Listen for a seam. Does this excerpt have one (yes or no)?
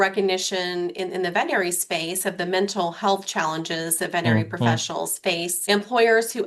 yes